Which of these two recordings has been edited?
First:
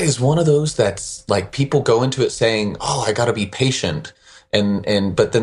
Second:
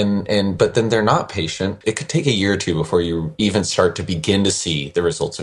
second; 1 cut; at 1.8 s

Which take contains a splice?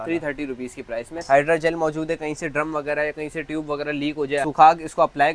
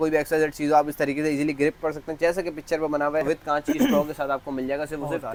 first; 2 cuts; at 1.2 s, 4.4 s

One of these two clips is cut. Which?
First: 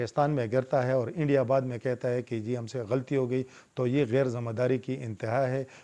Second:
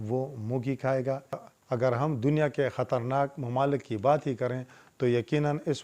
second; 1 cut; at 1.2 s

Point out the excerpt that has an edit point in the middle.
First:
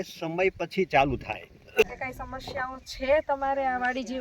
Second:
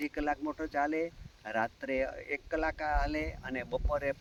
first; 1 cut; at 1.8 s

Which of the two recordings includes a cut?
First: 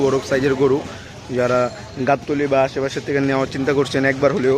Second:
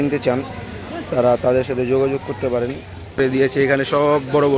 second; 1 cut; at 3.2 s

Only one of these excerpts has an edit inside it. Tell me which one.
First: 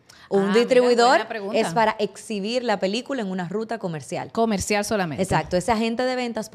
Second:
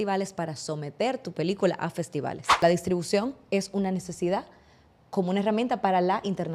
second; 1 cut; at 2.6 s

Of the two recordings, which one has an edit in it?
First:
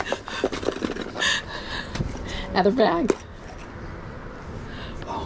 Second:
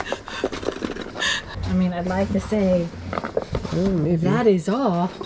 second; 1 cut; at 1.5 s

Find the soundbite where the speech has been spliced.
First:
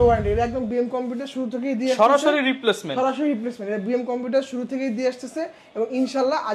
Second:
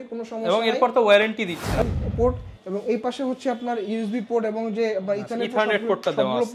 second; 1 cut; at 1.8 s

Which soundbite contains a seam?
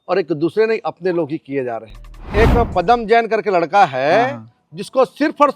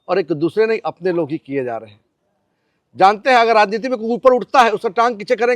first; 1 cut; at 2.3 s

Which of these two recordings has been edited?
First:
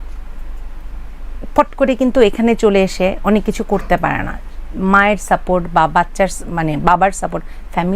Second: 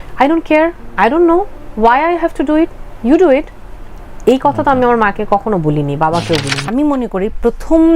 second; 1 cut; at 6.6 s

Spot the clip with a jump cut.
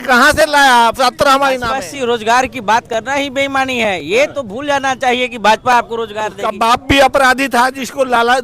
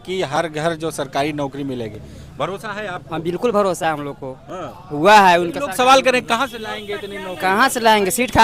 first; 2 cuts; at 1.7 s, 6.3 s

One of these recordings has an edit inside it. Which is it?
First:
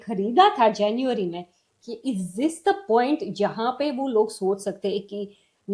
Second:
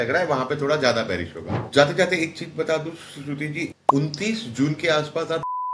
second; 2 cuts; at 1.6 s, 3.7 s

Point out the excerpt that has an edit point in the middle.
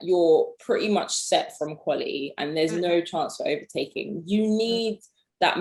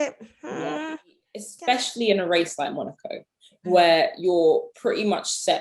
second; 1 cut; at 1.5 s

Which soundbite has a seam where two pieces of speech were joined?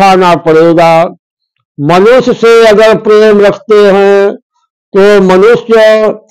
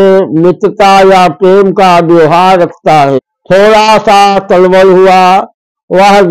second; 1 cut; at 3.3 s

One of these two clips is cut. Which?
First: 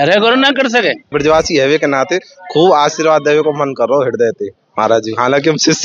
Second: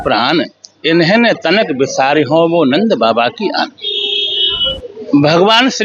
first; 1 cut; at 1.1 s

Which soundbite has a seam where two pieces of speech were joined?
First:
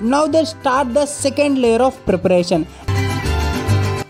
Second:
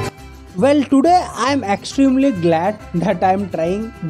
first; 1 cut; at 2.8 s

